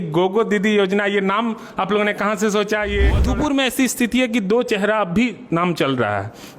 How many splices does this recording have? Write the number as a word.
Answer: one